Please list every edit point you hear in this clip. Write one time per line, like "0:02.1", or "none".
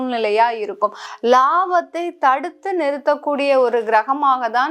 0:01.1